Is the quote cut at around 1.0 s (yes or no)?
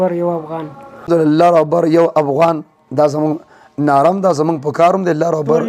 yes